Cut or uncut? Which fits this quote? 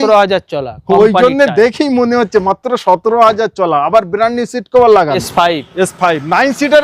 cut